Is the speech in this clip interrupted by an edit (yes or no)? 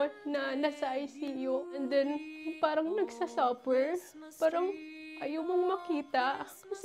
yes